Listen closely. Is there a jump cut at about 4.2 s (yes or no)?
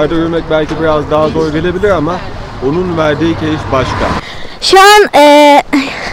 yes